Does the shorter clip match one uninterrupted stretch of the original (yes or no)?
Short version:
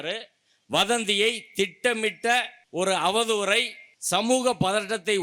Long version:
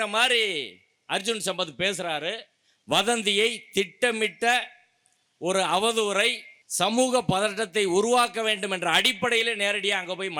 no